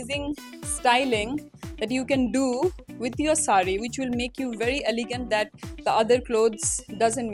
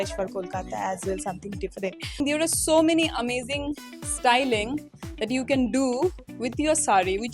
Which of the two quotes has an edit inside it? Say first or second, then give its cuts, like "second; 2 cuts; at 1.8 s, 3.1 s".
second; 1 cut; at 2.2 s